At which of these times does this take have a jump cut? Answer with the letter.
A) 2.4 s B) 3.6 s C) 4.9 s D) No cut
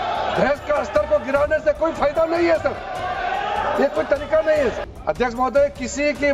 C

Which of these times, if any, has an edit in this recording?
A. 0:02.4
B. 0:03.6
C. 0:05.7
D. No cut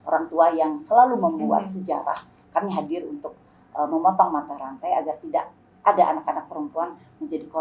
A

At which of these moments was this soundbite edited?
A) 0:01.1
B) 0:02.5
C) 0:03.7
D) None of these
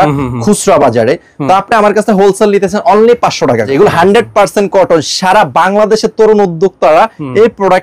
C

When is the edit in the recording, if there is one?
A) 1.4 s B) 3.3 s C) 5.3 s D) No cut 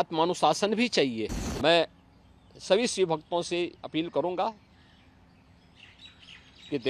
A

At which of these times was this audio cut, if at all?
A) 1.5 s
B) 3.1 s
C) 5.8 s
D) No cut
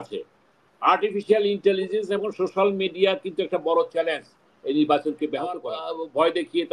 C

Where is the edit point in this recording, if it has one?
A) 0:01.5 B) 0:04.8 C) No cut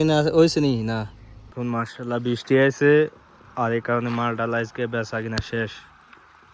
A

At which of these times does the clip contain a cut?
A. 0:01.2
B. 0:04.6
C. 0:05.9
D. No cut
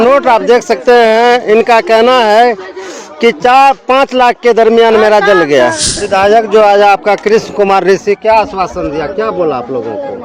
C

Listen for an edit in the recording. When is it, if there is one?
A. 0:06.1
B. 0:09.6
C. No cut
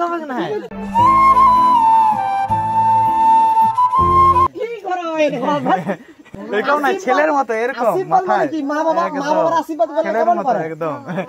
C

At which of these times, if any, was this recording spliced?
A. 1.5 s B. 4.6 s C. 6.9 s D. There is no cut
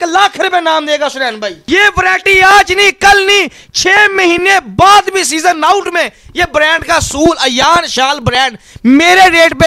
A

